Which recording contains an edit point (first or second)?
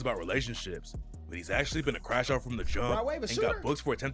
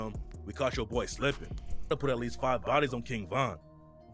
second